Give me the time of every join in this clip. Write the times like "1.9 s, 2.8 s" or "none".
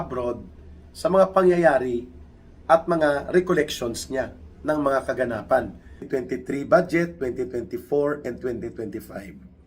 6.0 s